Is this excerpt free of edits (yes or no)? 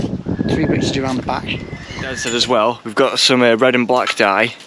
no